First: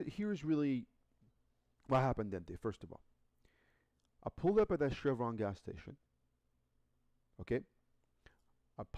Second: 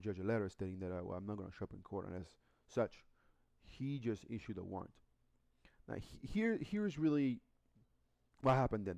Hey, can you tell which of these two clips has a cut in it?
second; 1 cut; at 2.1 s

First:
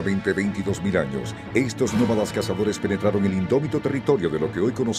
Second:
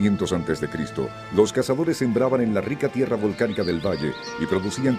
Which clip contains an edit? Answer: second; 1 cut; at 3.5 s

